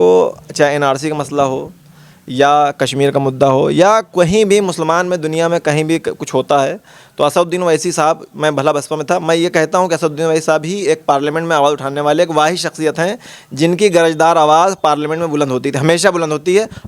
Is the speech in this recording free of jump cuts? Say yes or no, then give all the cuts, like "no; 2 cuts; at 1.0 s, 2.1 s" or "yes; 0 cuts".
yes; 0 cuts